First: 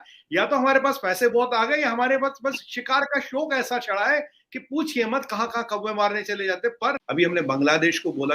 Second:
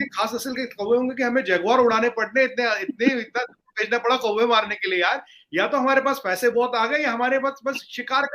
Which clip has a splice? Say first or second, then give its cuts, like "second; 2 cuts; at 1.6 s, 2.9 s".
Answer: first; 1 cut; at 7.0 s